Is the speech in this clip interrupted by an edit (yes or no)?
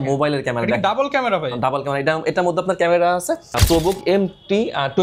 yes